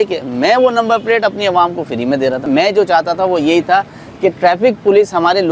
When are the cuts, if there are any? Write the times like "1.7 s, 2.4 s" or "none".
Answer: none